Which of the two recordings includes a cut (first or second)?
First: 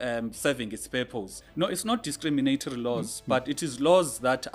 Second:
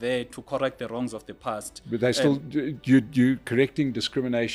first